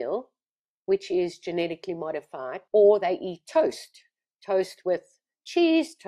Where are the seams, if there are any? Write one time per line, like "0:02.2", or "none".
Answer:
0:02.6